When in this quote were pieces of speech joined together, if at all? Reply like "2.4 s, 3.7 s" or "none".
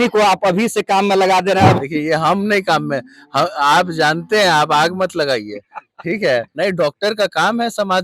1.8 s, 6.5 s

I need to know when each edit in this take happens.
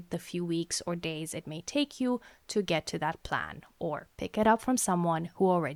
none

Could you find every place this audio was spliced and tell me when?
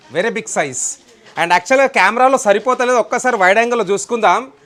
none

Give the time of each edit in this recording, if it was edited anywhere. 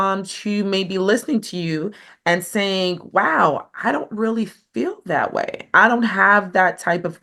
none

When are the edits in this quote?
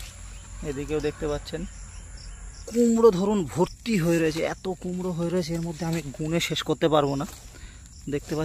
2.6 s

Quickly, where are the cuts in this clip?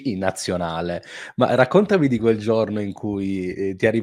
none

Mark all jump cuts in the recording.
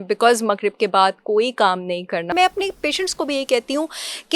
2.3 s

